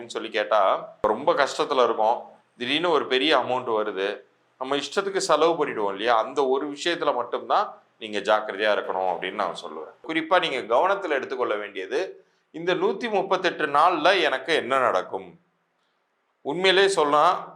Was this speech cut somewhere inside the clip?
yes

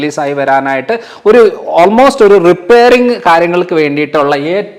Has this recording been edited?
no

